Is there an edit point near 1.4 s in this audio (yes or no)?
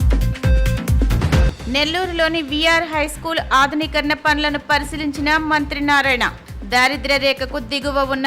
no